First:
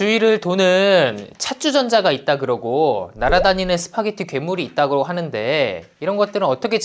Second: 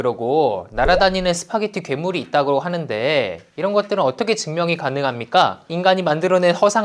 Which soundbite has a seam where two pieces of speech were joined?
second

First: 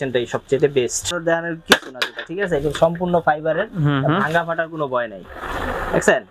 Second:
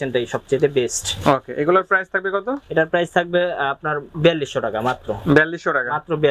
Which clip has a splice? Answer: first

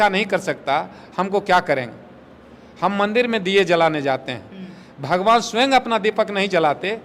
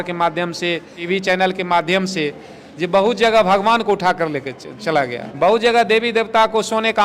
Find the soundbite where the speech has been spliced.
second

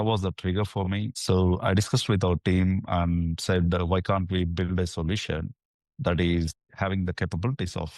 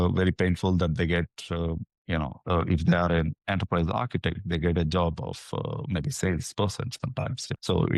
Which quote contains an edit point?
first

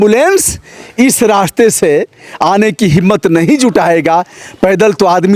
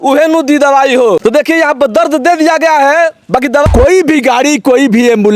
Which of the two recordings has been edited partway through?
second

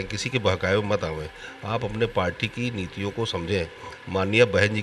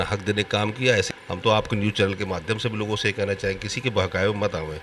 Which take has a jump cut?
second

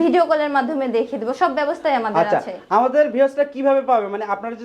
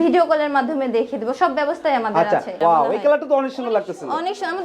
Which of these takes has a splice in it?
second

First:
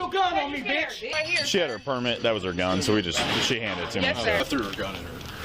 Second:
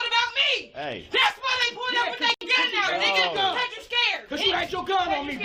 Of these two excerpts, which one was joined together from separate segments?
first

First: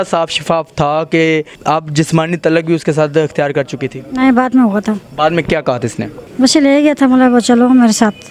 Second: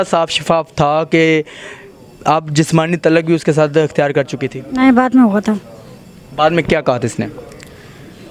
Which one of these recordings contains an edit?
first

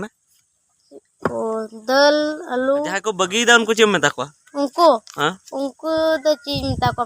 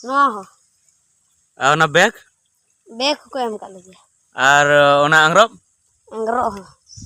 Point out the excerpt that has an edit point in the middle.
first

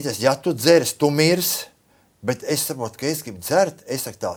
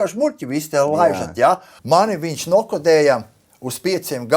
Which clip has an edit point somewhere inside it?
second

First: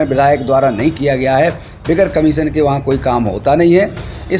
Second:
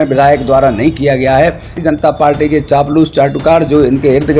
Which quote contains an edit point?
second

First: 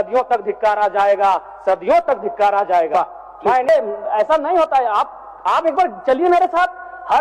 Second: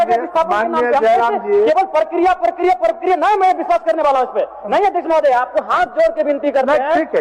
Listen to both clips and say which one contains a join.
first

